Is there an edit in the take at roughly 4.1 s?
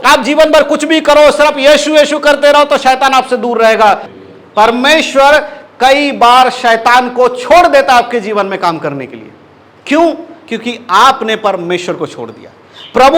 yes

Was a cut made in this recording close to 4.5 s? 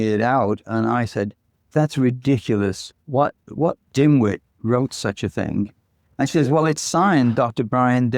yes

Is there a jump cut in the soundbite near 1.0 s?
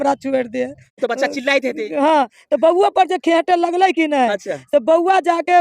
yes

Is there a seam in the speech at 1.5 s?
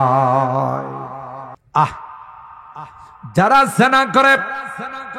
yes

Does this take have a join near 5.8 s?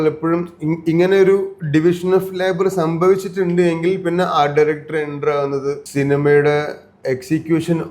yes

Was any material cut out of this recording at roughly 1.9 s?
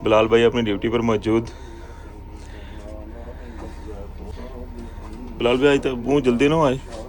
no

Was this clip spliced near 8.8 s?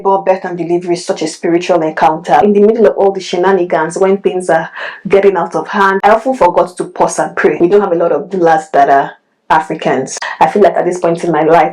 no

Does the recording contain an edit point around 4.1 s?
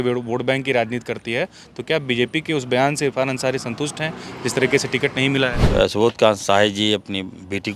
no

